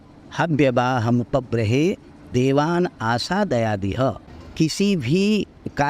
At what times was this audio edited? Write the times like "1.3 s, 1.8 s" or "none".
3.9 s